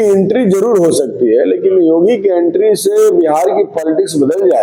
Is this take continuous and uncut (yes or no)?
yes